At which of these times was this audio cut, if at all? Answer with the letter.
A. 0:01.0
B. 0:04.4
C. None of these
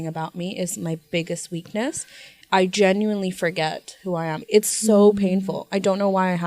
B